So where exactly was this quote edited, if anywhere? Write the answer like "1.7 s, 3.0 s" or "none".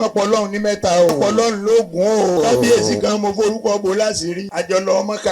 1.1 s, 2.4 s, 4.4 s